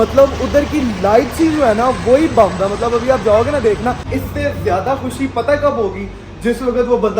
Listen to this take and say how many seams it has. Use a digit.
1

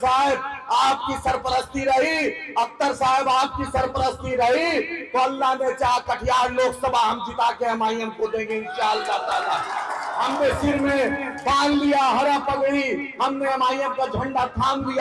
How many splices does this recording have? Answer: 0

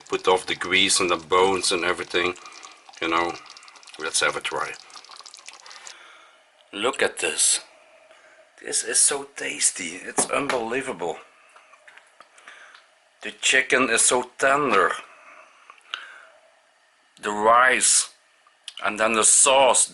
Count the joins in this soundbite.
1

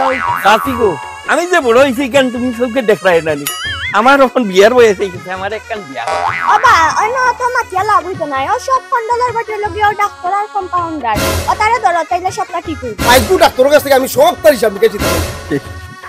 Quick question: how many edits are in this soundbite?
2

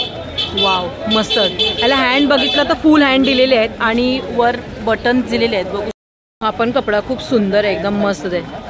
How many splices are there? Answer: 1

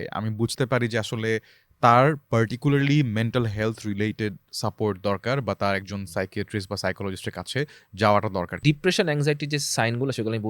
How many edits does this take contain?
1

